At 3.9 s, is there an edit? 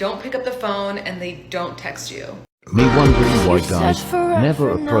no; 1 cut; at 2.5 s

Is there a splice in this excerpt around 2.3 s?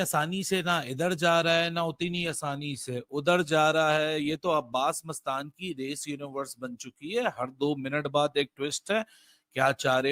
no; 0 cuts

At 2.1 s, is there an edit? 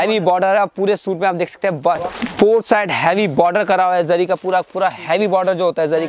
yes; 1 cut; at 2.1 s

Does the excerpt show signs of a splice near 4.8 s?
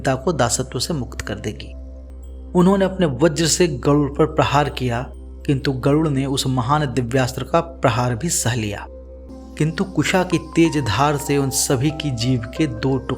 no; 2 cuts; at 2.0 s, 9.3 s

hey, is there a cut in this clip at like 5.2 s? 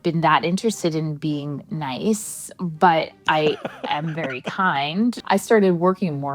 yes; 1 cut; at 5.2 s

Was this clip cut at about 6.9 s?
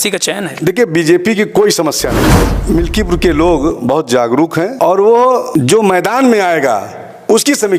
no; 3 cuts; at 2.5 s, 4.7 s, 5.5 s

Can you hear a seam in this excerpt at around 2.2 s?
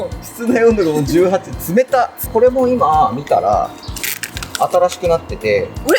yes; 1 cut; at 2.2 s

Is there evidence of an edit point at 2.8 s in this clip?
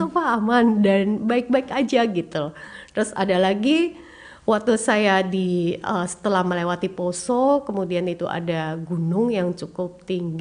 yes; 1 cut; at 2.8 s

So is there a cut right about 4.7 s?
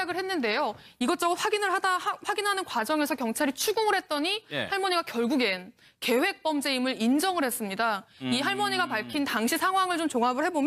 no; 1 cut; at 2.0 s

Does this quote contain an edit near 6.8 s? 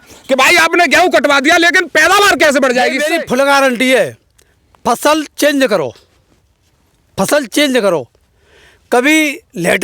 no; 1 cut; at 3.0 s

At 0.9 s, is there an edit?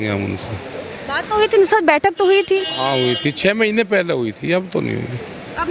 no; 0 cuts

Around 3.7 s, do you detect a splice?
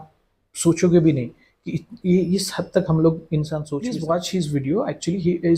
yes; 1 cut; at 3.7 s

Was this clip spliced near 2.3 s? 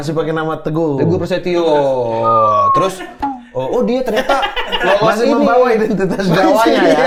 no; 0 cuts

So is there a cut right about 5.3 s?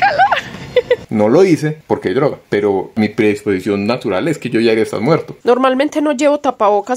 yes; 3 cuts; at 1.1 s, 2.9 s, 5.3 s

